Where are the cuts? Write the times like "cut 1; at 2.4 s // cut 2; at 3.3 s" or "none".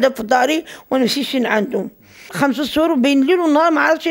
cut 1; at 2.3 s